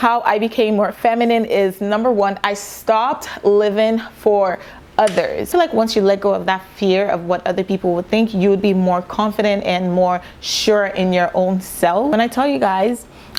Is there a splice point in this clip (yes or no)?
no